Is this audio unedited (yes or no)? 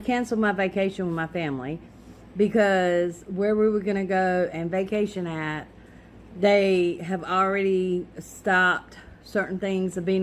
yes